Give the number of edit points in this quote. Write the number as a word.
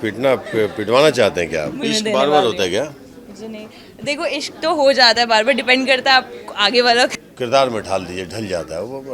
two